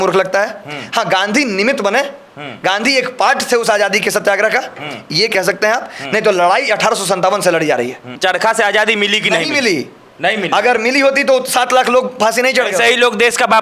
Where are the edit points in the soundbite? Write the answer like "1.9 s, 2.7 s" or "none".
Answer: 8.1 s